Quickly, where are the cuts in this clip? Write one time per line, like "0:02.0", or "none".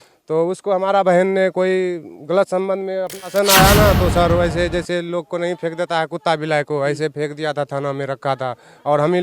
0:03.2